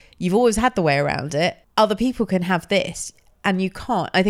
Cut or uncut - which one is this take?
cut